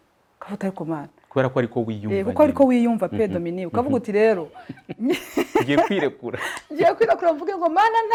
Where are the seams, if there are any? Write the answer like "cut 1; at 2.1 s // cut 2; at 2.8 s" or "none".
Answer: none

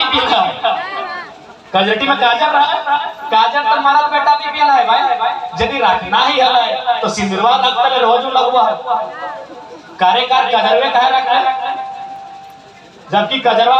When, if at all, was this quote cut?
none

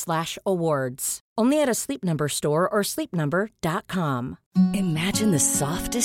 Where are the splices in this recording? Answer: cut 1; at 4.4 s

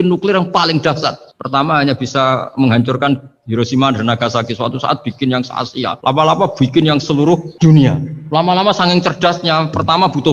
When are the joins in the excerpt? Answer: cut 1; at 6.0 s // cut 2; at 7.5 s // cut 3; at 8.1 s

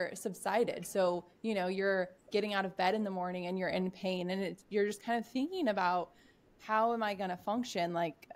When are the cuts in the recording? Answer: none

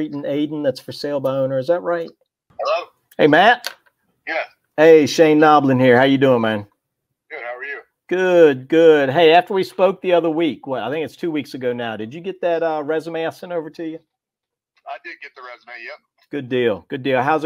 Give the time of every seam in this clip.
cut 1; at 2.5 s

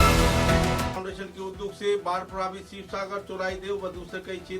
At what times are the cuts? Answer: cut 1; at 1.0 s

